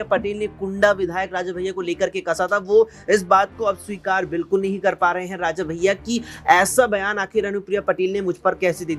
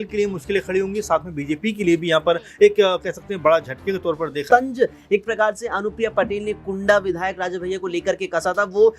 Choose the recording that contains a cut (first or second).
second